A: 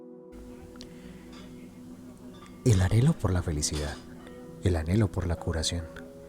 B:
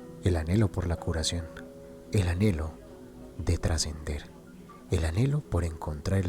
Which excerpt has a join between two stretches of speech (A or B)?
A